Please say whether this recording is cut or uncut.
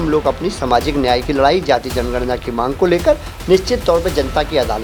uncut